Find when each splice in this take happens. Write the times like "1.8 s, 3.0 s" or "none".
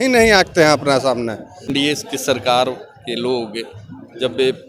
1.7 s